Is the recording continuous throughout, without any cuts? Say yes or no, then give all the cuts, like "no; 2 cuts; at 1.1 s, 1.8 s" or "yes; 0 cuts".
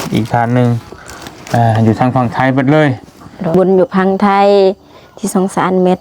no; 1 cut; at 3.5 s